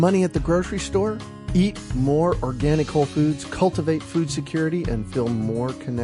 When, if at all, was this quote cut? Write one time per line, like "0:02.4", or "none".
none